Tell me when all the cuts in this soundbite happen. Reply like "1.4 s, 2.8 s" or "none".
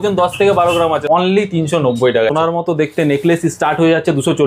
1.0 s, 2.3 s